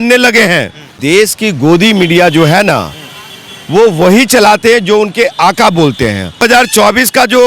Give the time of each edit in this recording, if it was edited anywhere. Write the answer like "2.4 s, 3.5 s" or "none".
1.0 s, 6.4 s